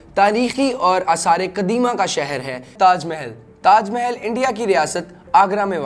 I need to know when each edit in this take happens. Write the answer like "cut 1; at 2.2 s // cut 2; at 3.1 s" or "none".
cut 1; at 2.7 s